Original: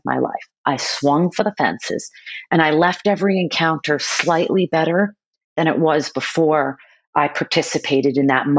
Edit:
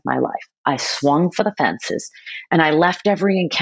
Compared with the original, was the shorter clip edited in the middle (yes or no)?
no